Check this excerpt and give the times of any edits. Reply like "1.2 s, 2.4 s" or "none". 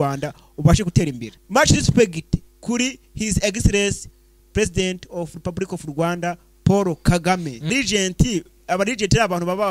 1.3 s, 7.7 s